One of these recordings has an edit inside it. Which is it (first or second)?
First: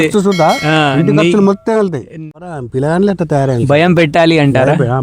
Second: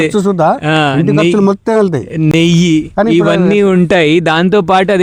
first